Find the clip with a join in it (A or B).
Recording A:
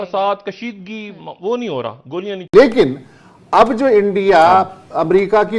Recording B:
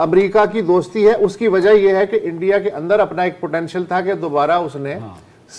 A